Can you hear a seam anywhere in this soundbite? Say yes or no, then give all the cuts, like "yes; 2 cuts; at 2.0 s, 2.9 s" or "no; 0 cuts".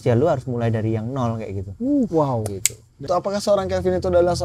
yes; 1 cut; at 3.1 s